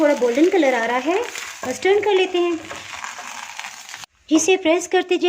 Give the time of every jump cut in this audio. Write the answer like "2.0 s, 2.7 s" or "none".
4.1 s